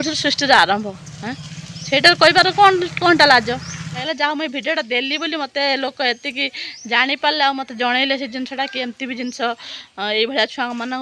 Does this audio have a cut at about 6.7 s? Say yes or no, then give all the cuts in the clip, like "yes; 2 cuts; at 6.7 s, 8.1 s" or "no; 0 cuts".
no; 1 cut; at 4.0 s